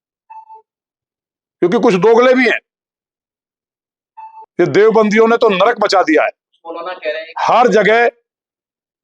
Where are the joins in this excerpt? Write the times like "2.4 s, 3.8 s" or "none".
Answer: 4.5 s